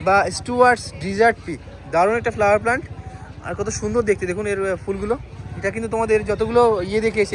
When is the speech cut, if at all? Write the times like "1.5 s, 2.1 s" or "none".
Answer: none